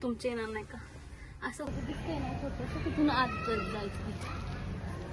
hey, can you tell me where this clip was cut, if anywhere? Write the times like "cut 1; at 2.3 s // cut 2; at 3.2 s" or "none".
cut 1; at 1.7 s